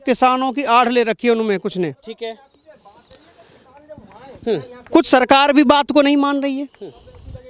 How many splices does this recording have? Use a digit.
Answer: 0